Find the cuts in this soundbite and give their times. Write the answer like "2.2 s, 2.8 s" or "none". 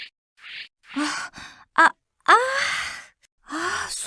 0.9 s